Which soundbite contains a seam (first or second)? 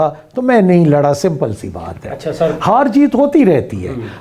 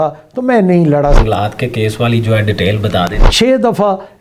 second